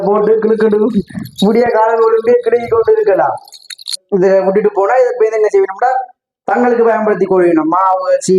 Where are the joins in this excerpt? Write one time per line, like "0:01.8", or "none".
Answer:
0:04.0